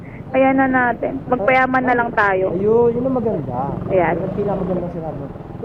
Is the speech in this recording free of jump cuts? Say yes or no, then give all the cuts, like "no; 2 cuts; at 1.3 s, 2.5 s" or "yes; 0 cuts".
yes; 0 cuts